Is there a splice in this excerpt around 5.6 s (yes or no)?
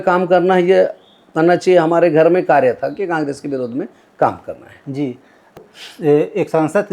yes